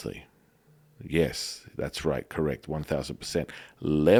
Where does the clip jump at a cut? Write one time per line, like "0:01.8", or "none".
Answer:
none